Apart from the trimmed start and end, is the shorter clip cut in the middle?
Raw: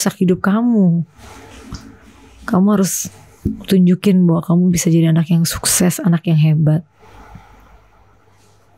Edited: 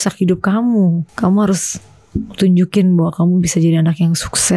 yes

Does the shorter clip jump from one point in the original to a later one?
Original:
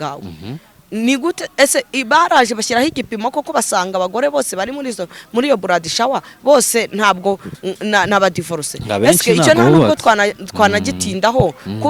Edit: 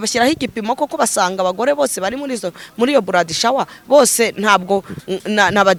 no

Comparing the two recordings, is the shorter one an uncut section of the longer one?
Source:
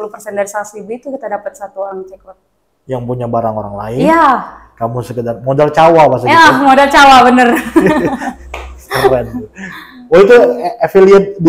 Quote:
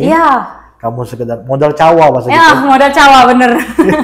yes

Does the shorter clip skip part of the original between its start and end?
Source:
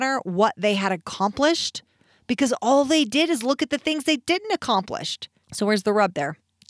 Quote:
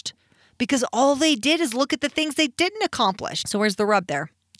yes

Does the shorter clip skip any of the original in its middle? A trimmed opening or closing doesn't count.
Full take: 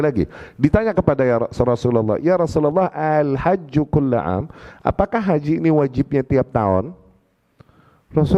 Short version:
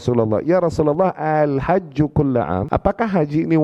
yes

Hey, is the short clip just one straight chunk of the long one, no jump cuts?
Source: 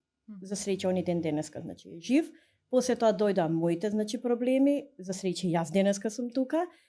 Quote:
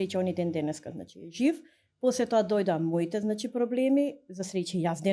yes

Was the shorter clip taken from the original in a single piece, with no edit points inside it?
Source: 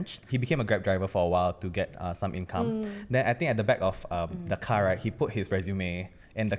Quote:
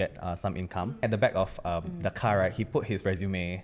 no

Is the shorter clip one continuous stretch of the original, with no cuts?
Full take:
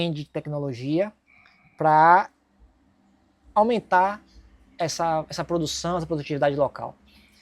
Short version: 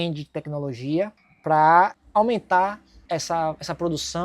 no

